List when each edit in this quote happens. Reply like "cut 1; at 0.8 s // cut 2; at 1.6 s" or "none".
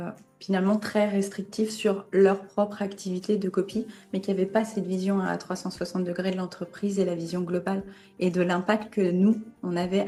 none